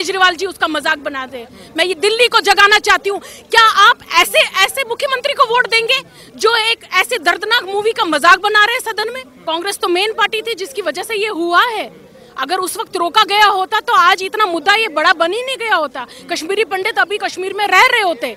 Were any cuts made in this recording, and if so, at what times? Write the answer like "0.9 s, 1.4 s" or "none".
9.3 s